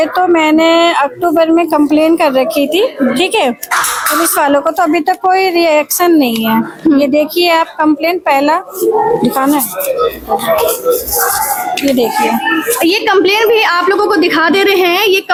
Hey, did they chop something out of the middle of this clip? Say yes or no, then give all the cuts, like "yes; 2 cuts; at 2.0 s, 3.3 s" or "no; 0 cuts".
no; 0 cuts